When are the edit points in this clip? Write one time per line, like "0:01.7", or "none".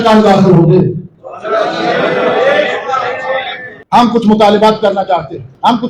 0:03.8